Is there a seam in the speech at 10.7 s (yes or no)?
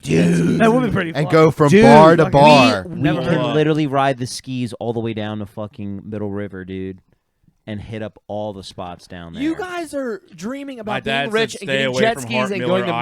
no